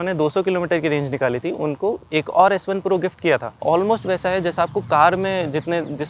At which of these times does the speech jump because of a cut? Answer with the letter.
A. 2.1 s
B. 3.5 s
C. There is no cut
B